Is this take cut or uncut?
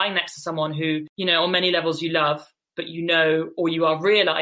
cut